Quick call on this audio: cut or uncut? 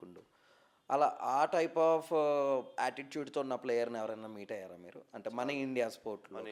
uncut